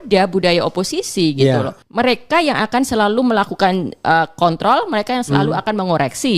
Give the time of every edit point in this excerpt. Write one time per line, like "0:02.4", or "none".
0:01.8